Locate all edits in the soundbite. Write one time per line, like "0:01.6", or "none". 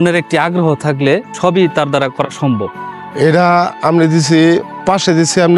0:03.0